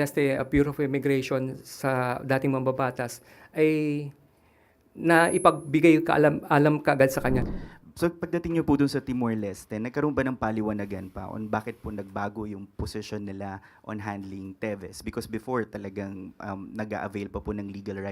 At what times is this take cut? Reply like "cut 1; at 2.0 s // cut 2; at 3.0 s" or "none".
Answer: cut 1; at 7.4 s